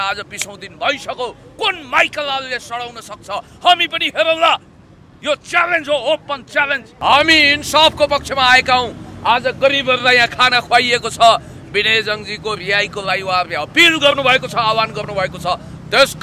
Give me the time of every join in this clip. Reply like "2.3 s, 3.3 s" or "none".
6.9 s